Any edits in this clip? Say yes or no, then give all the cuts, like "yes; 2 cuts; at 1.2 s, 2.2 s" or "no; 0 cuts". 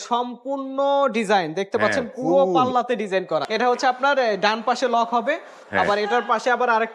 yes; 1 cut; at 3.4 s